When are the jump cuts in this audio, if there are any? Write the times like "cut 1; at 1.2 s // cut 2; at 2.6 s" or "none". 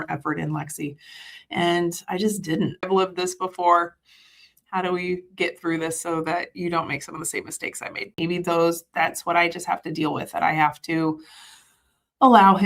cut 1; at 2.9 s // cut 2; at 8.1 s